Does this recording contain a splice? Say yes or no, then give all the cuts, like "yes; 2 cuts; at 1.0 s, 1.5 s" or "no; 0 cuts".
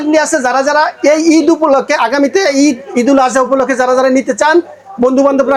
no; 0 cuts